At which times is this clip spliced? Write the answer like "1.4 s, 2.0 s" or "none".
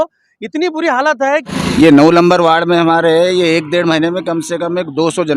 1.5 s